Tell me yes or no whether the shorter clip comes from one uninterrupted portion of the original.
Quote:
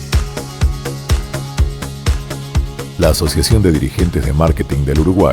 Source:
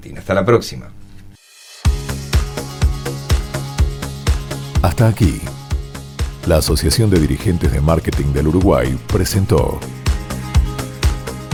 no